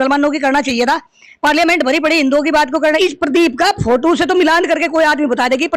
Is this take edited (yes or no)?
yes